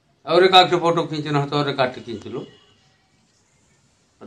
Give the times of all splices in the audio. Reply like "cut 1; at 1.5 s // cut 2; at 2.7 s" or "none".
none